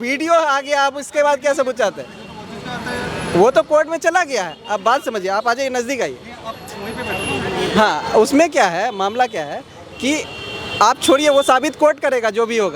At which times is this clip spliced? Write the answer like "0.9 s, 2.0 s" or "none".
none